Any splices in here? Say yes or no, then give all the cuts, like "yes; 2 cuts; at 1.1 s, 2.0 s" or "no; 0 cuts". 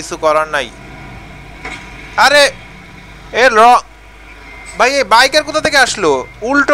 no; 0 cuts